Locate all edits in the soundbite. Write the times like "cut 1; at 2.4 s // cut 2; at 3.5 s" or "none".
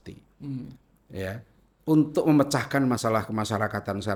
none